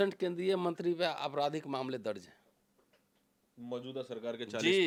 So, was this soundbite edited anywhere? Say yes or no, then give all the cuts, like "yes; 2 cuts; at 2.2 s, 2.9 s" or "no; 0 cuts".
no; 0 cuts